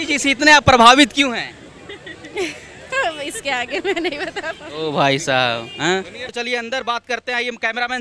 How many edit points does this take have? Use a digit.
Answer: 1